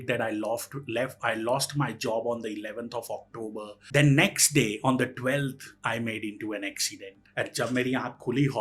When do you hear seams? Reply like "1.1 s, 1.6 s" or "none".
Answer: 3.8 s, 7.2 s